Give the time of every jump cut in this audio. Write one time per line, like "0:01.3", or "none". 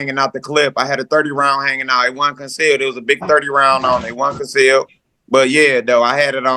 none